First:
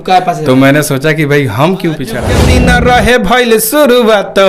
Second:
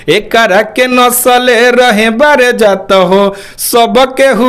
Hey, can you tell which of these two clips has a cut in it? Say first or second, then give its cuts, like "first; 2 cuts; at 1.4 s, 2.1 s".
first; 1 cut; at 2.4 s